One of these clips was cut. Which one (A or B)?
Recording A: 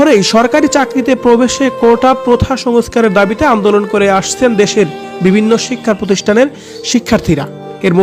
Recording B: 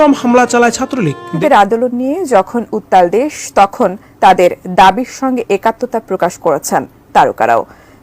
B